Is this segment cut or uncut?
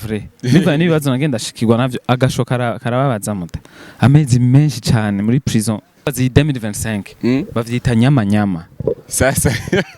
cut